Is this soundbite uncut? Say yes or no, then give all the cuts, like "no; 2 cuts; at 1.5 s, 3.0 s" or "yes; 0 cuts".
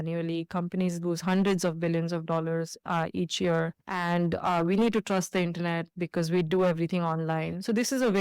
yes; 0 cuts